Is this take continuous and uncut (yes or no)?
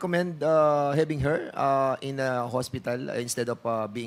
yes